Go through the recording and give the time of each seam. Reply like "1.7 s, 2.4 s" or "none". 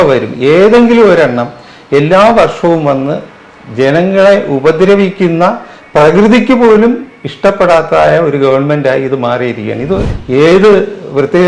10.1 s